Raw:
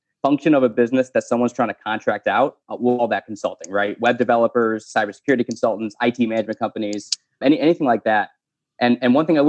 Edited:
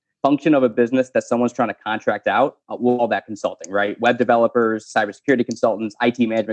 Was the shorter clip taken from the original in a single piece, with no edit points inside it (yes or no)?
yes